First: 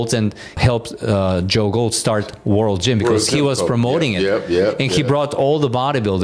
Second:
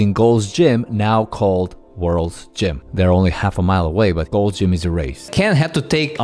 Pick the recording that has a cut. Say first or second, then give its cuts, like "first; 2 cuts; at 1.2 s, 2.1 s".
second; 3 cuts; at 2.8 s, 4.3 s, 5.3 s